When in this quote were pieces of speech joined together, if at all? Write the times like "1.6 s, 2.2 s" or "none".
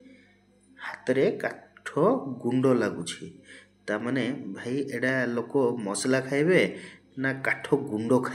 none